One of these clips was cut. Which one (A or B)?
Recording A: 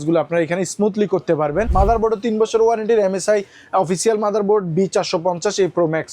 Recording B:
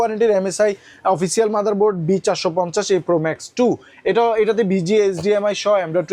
A